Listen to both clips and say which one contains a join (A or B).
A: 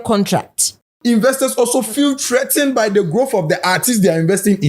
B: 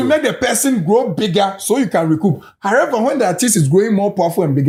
A